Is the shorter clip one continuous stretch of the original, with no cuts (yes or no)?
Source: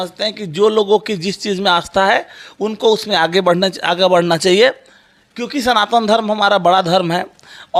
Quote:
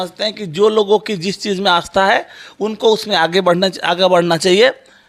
yes